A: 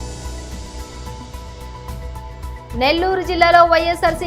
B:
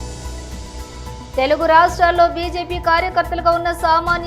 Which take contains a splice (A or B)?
A